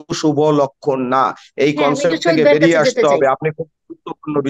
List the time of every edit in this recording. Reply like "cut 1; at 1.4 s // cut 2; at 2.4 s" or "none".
none

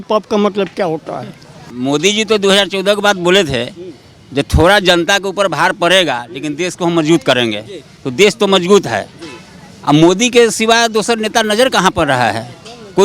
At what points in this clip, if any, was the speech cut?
cut 1; at 1.8 s

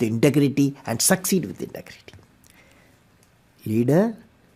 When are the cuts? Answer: none

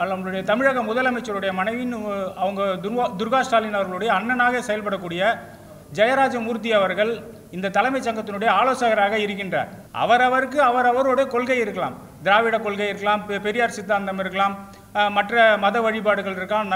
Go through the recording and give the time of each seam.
cut 1; at 9.8 s

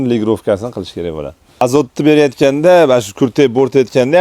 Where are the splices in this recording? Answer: cut 1; at 1.6 s

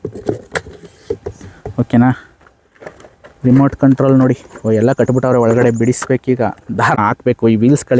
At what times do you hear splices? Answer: cut 1; at 7.0 s

